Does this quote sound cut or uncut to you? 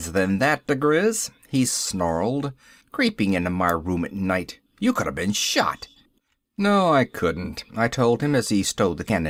uncut